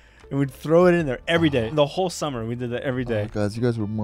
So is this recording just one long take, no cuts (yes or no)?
no